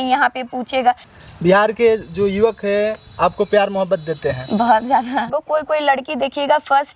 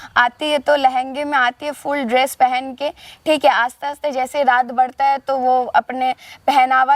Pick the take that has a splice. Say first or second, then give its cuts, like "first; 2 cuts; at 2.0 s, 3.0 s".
first; 2 cuts; at 1.1 s, 5.3 s